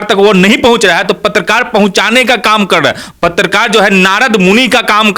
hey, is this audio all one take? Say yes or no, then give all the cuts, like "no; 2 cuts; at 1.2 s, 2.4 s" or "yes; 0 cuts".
yes; 0 cuts